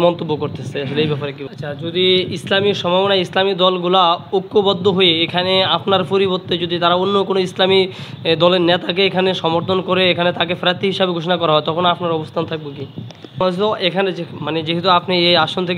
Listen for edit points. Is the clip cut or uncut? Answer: cut